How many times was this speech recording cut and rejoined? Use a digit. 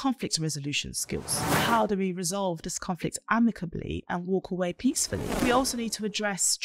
2